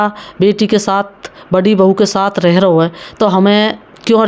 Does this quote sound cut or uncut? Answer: uncut